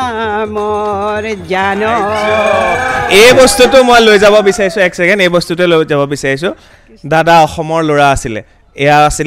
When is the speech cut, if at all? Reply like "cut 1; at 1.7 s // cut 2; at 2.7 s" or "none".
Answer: none